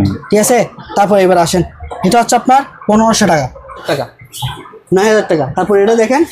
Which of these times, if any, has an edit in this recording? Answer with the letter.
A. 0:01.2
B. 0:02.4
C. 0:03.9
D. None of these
C